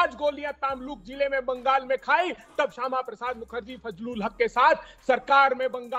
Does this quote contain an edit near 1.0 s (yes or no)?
no